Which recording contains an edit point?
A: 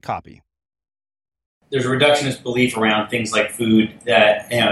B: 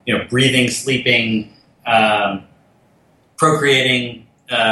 A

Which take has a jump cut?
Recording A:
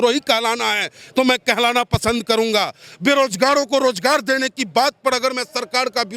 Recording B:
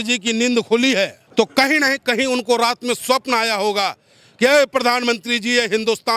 B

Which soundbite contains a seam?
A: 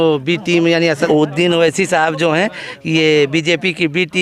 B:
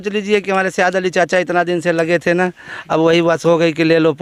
A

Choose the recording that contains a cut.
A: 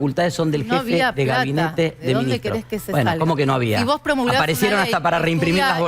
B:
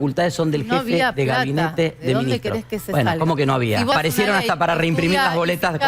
B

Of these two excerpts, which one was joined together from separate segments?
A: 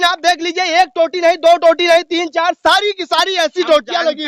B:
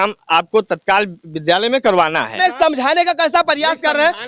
B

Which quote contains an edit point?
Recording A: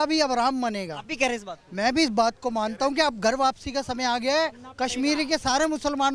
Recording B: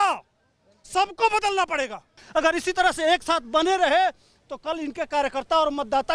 B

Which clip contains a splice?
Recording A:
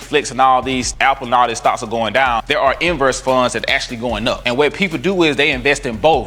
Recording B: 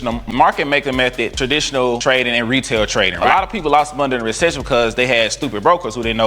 B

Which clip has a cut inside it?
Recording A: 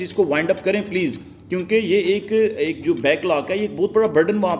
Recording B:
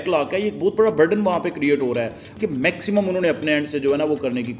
B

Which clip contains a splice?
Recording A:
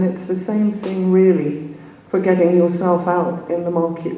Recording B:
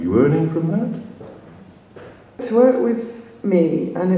B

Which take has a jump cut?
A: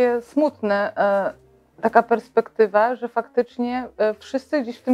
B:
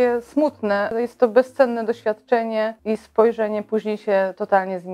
B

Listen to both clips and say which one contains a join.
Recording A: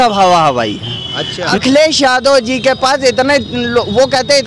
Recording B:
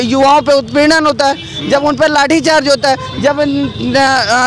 A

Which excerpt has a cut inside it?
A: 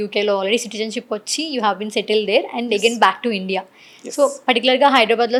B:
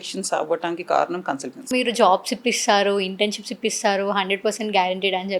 B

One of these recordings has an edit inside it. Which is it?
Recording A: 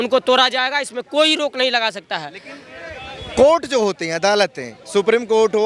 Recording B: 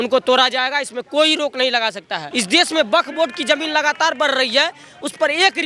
B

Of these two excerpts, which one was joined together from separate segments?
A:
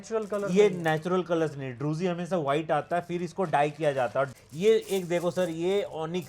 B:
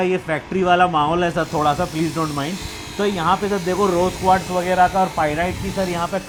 A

